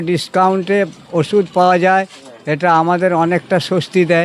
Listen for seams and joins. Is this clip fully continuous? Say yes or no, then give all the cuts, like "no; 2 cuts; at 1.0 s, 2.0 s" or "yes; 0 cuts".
yes; 0 cuts